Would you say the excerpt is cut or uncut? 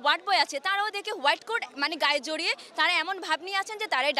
uncut